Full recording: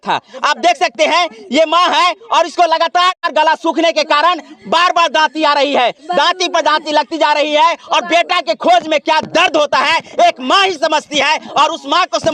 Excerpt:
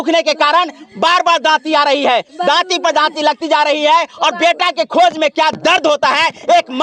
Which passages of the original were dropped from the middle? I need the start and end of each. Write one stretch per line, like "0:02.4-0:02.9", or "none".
none